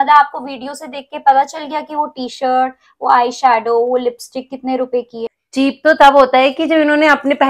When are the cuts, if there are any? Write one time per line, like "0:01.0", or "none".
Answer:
0:05.3